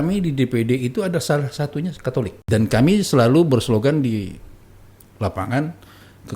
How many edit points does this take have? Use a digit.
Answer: 1